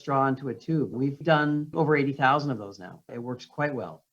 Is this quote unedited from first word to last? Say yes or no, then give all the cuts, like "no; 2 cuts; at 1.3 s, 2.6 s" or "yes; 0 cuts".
no; 2 cuts; at 0.9 s, 1.7 s